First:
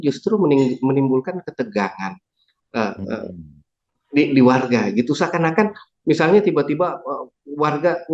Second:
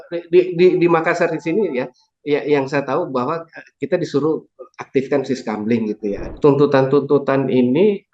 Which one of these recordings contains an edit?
second; 1 cut; at 6.2 s

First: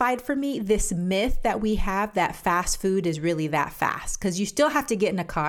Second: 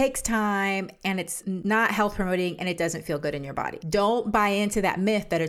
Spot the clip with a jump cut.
second; 2 cuts; at 1.5 s, 3.8 s

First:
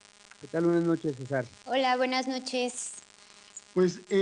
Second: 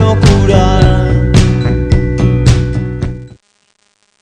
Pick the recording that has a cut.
first; 1 cut; at 2.1 s

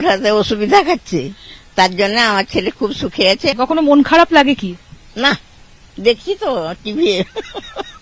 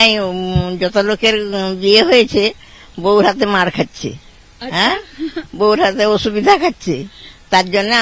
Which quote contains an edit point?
first; 1 cut; at 3.6 s

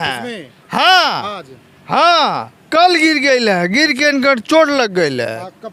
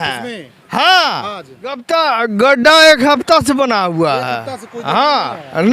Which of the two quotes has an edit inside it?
second; 1 cut; at 1.8 s

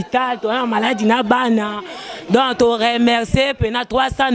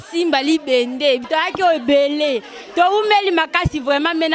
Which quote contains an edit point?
second; 1 cut; at 1.2 s

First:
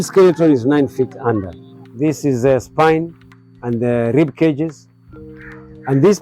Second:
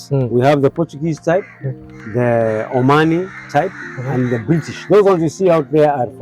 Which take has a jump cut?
first; 1 cut; at 1.9 s

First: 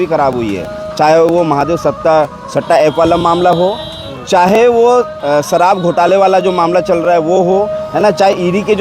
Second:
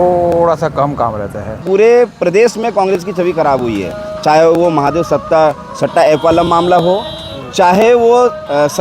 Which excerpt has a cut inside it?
second; 1 cut; at 1.6 s

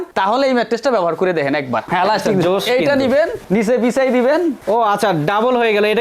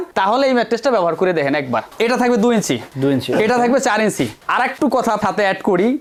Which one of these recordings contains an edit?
first; 1 cut; at 1.9 s

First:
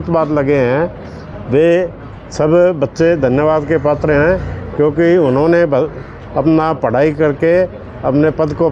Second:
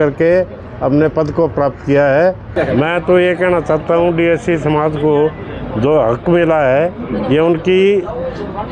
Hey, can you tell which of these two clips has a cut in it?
second; 1 cut; at 2.4 s

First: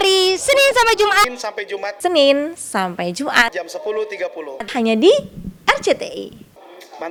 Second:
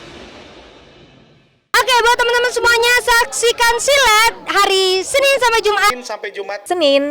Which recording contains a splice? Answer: second; 1 cut; at 1.5 s

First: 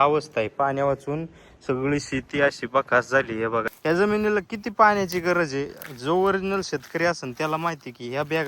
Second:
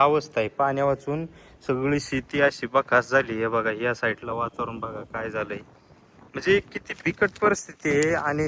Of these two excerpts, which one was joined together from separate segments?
first; 1 cut; at 3.7 s

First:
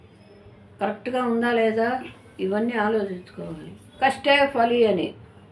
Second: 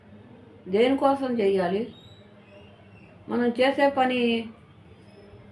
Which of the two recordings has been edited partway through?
first; 1 cut; at 3.9 s

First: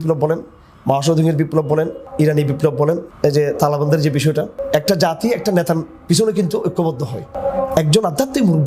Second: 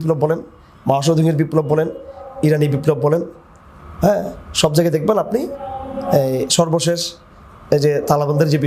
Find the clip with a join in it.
first; 4 cuts; at 2.0 s, 3.1 s, 4.6 s, 7.3 s

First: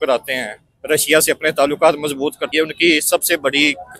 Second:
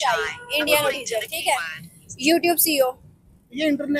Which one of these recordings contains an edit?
first; 1 cut; at 2.4 s

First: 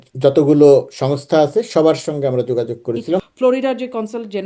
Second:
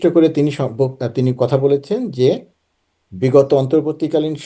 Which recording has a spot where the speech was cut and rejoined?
first; 1 cut; at 3.2 s

